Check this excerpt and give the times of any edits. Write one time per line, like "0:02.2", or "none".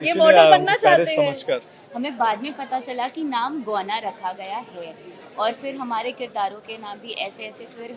0:01.8